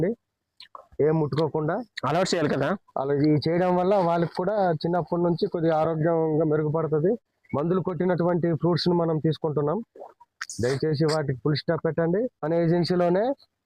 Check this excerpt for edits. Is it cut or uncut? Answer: uncut